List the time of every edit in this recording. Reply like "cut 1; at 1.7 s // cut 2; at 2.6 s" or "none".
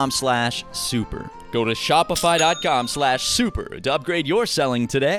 none